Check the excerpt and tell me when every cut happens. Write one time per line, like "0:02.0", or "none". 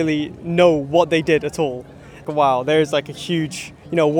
0:02.2